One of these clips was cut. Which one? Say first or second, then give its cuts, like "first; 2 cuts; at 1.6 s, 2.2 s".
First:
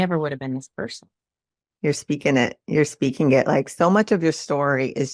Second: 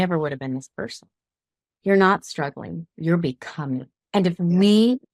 second; 1 cut; at 1.6 s